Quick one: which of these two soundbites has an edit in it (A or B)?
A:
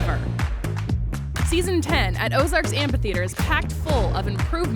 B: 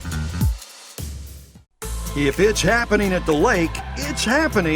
B